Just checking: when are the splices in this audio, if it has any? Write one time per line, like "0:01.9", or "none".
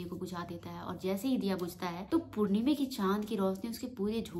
none